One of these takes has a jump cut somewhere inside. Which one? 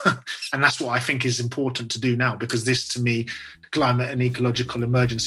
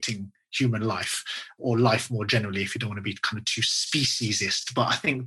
second; 1 cut; at 1.6 s

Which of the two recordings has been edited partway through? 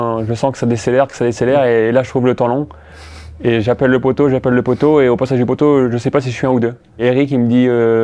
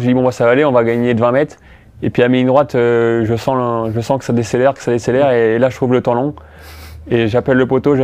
first; 1 cut; at 7.0 s

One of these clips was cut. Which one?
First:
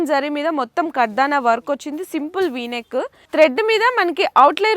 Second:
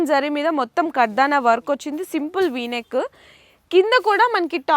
first; 1 cut; at 3.2 s

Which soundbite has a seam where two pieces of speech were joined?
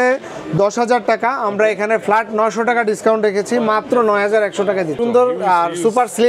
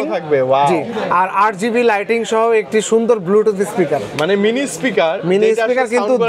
first; 1 cut; at 5.0 s

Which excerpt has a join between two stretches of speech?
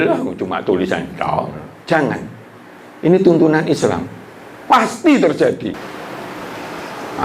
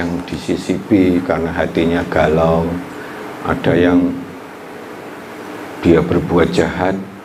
first; 1 cut; at 5.8 s

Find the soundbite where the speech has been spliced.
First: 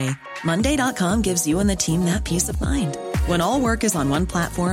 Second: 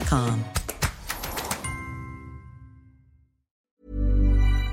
second; 1 cut; at 3.7 s

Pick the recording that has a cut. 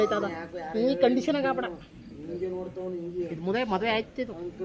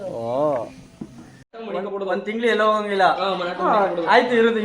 second; 1 cut; at 1.6 s

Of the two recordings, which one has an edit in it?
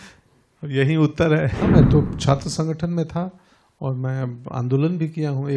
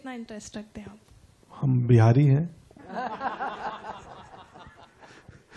first; 1 cut; at 1.6 s

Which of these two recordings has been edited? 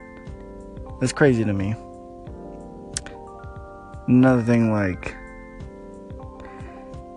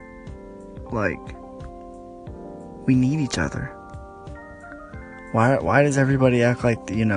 second; 1 cut; at 0.9 s

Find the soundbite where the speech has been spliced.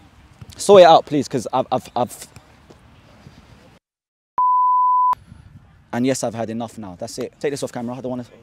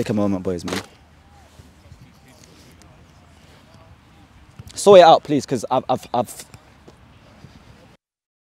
first; 2 cuts; at 5.3 s, 7.3 s

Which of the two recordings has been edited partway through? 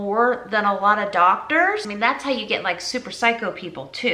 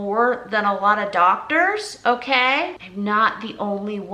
first; 1 cut; at 1.9 s

